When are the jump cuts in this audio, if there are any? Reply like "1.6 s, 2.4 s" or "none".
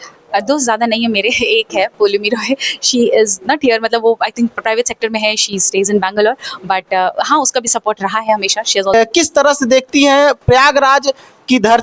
8.9 s